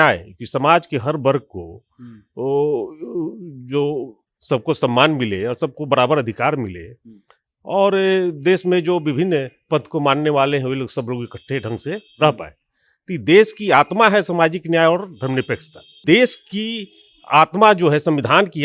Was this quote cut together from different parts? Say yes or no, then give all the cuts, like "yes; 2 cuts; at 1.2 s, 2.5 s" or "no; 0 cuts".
yes; 1 cut; at 16.0 s